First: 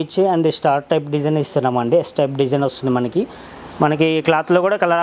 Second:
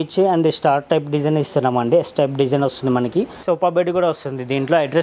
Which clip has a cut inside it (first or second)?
second